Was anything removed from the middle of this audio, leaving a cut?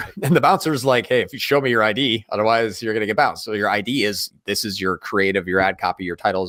no; 0 cuts

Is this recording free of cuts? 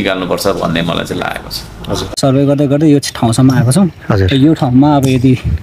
no; 1 cut; at 2.1 s

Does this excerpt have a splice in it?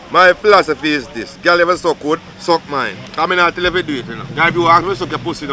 yes; 3 cuts; at 2.3 s, 3.0 s, 4.2 s

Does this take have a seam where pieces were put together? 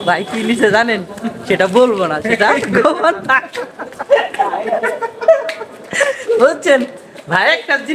no; 0 cuts

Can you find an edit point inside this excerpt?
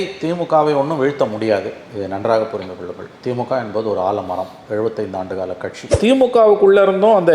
yes; 1 cut; at 6.0 s

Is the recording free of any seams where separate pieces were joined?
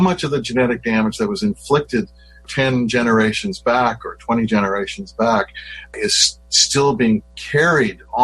yes; 0 cuts

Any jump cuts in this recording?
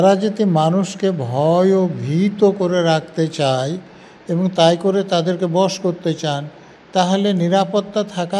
no; 0 cuts

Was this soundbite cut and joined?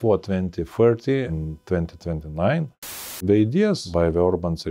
yes; 3 cuts; at 1.3 s, 3.2 s, 3.8 s

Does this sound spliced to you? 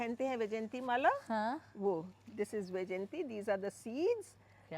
no; 0 cuts

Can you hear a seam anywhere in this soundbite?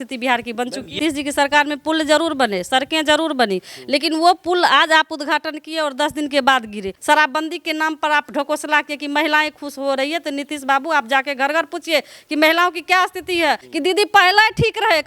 yes; 3 cuts; at 0.9 s, 6.9 s, 13.7 s

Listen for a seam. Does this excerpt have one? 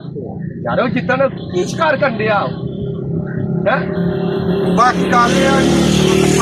no; 0 cuts

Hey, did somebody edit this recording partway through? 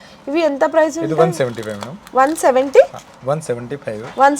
no; 0 cuts

